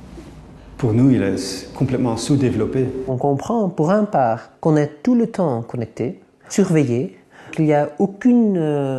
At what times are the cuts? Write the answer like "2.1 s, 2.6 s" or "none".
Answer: 3.0 s, 4.5 s, 6.5 s, 7.5 s